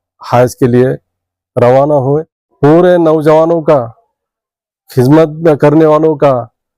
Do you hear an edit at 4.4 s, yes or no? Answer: no